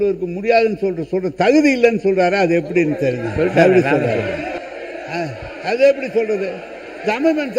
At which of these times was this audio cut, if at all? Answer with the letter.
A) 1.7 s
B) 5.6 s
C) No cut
C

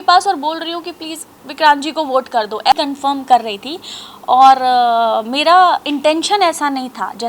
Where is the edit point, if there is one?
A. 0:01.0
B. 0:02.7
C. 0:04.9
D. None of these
B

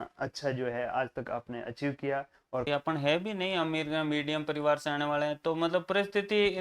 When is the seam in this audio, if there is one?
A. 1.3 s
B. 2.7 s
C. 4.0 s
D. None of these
B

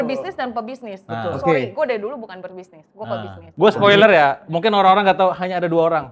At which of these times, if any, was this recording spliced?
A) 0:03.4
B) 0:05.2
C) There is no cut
A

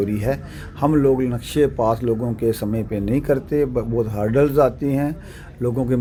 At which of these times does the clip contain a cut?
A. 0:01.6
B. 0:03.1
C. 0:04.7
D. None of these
D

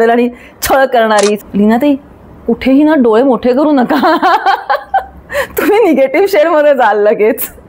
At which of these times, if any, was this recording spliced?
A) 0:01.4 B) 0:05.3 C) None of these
A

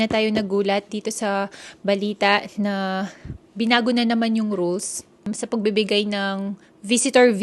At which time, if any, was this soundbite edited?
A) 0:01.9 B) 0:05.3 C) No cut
B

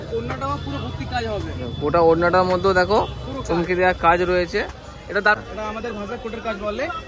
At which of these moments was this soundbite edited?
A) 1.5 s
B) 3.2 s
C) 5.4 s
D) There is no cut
C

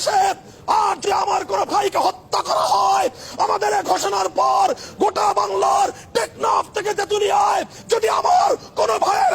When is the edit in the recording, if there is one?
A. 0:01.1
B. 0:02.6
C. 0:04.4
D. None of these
A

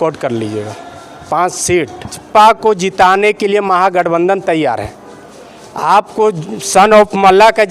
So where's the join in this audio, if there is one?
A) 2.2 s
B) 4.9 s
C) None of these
A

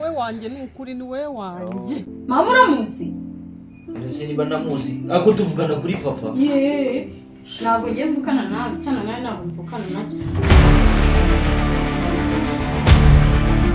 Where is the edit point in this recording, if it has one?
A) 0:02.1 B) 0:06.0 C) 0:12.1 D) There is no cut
A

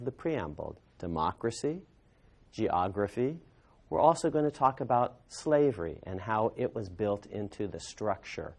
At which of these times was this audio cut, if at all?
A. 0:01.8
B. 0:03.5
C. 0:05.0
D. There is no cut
D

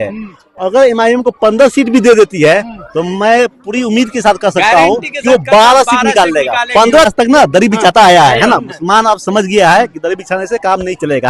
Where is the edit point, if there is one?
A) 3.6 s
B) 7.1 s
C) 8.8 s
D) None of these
B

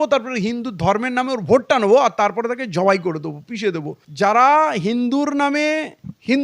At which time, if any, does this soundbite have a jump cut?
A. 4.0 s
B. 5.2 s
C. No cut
A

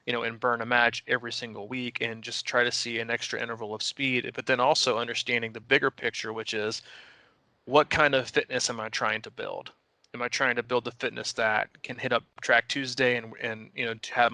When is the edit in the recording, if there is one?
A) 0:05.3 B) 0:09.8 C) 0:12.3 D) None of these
D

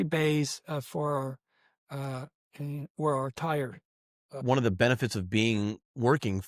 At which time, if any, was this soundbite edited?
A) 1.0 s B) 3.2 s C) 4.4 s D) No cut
C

